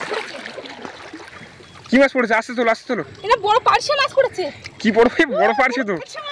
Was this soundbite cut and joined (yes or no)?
yes